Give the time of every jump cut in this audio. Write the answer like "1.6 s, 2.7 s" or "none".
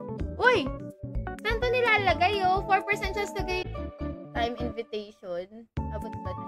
3.6 s